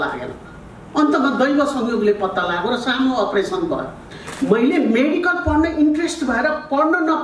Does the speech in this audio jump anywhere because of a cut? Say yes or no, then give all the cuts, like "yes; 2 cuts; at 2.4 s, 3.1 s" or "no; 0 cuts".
yes; 1 cut; at 4.1 s